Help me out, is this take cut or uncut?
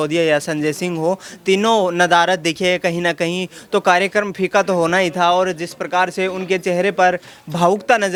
uncut